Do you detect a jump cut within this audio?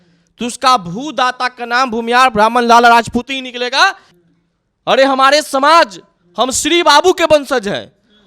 yes; 1 cut; at 4.0 s

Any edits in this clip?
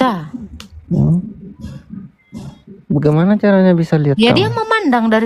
no; 0 cuts

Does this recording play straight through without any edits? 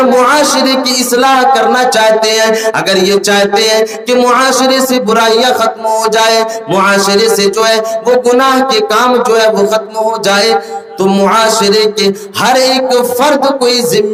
yes; 0 cuts

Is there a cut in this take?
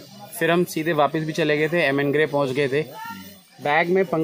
no; 0 cuts

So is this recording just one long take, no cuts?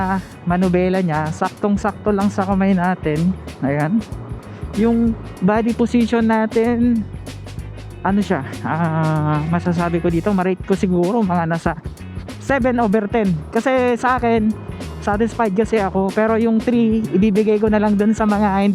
yes; 0 cuts

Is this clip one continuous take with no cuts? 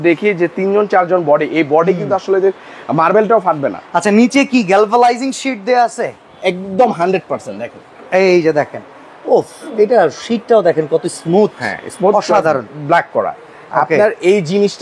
yes; 0 cuts

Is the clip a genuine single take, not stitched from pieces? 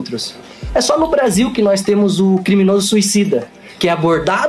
yes; 0 cuts

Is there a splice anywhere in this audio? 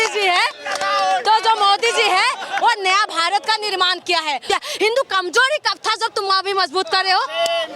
yes; 1 cut; at 4.4 s

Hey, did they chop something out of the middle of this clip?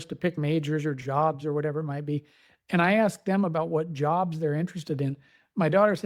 no; 0 cuts

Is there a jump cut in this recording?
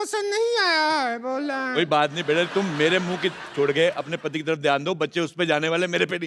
yes; 1 cut; at 2.5 s

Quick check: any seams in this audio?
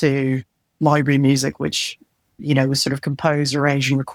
no; 0 cuts

